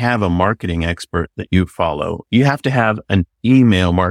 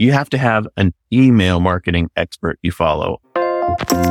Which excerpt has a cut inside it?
second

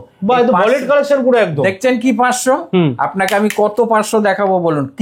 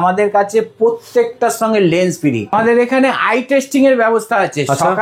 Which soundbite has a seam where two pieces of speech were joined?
second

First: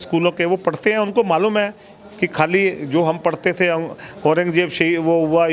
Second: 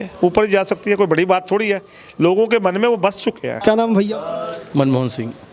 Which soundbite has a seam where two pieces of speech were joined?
second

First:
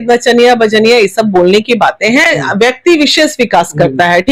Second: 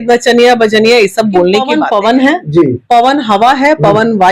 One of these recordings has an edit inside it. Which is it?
second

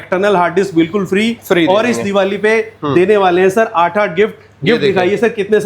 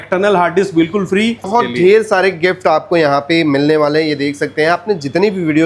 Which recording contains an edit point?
second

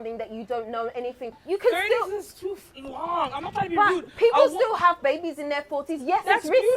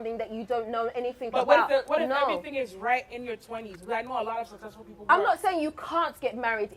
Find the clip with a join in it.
first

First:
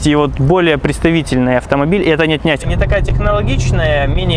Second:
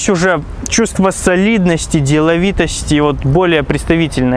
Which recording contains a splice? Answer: first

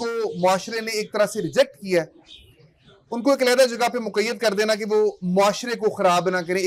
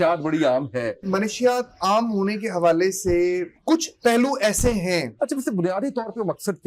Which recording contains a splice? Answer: second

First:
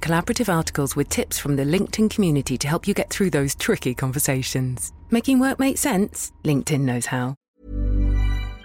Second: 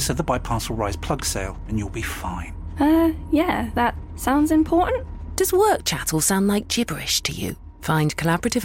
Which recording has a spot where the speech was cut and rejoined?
first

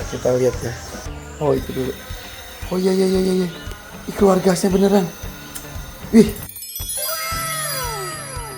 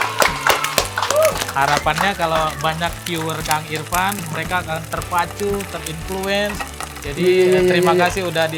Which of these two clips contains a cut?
first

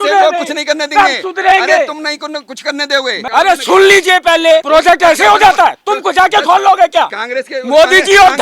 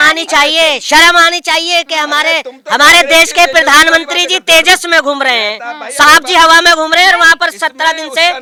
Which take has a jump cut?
first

